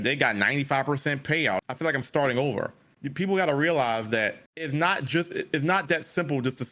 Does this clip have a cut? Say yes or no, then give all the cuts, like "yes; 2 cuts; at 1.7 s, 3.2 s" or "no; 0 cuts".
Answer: yes; 2 cuts; at 1.6 s, 4.5 s